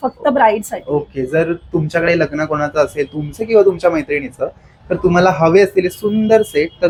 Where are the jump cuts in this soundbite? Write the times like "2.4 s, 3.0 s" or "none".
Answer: none